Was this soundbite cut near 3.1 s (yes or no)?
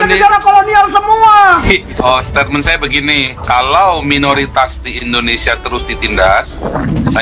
no